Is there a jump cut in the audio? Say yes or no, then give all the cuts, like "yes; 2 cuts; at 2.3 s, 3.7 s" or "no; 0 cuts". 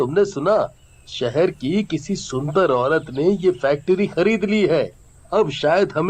no; 0 cuts